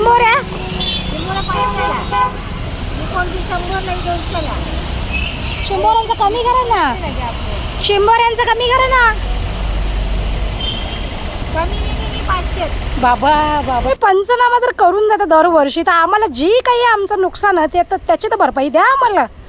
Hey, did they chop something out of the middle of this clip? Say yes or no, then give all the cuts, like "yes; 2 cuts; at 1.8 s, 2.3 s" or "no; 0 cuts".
yes; 1 cut; at 13.9 s